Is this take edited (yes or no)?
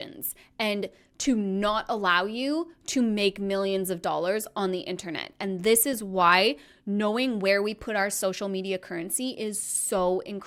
no